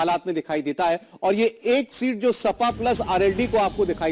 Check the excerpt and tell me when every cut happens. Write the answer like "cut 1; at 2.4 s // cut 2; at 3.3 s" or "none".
none